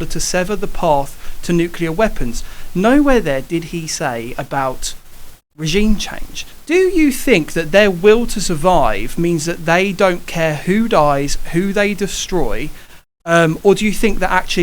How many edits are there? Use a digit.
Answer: 1